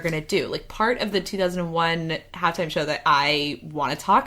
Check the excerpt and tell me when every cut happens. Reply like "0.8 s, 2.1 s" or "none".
none